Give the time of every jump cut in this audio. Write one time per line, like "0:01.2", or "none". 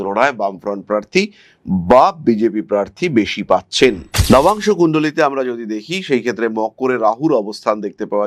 none